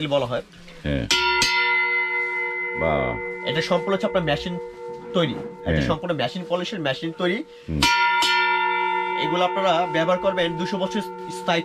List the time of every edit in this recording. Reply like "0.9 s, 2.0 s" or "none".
none